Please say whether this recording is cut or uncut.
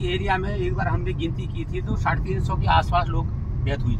uncut